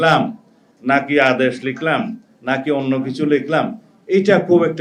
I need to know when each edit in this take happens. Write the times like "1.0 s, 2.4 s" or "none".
none